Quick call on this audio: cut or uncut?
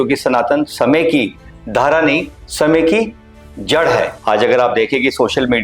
cut